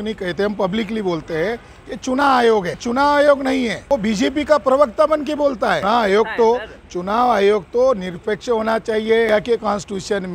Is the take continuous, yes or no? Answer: no